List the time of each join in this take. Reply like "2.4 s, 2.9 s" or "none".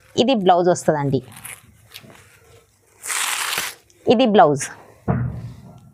none